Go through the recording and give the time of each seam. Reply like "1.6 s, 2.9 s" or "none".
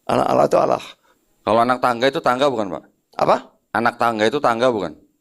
1.0 s